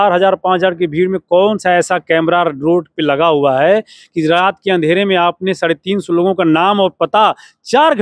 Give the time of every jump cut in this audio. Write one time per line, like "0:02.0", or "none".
none